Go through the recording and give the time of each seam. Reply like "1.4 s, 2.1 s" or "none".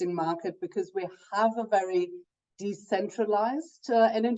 none

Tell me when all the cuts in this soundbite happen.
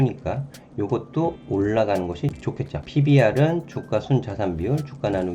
1.4 s, 2.5 s

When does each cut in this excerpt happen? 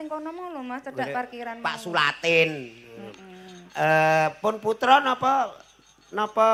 none

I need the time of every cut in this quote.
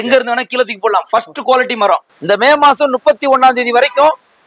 2.1 s

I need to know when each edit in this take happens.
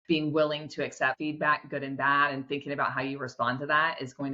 1.2 s

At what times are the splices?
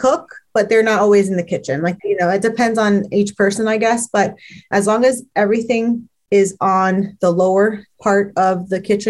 1.9 s

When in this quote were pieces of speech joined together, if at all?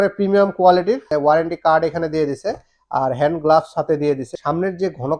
1.1 s, 4.3 s

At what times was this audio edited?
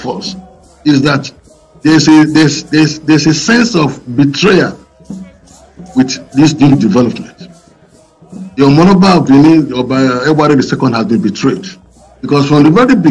none

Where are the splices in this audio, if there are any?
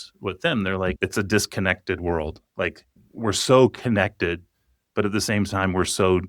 1.0 s

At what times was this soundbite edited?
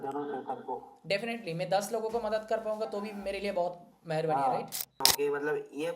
5.0 s

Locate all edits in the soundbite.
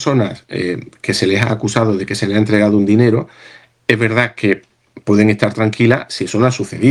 none

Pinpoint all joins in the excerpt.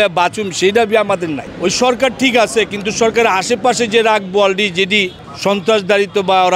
1.4 s, 5.2 s

